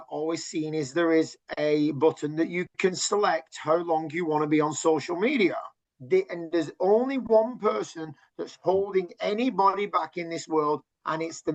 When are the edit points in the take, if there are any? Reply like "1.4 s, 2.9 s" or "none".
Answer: 5.8 s